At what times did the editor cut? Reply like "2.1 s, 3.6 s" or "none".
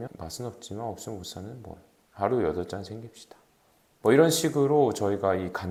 none